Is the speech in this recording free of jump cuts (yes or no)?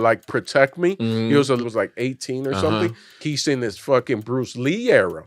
no